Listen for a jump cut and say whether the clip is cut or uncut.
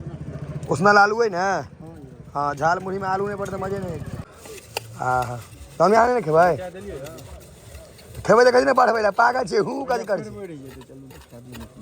cut